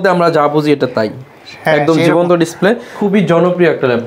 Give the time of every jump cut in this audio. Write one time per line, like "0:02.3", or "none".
0:02.9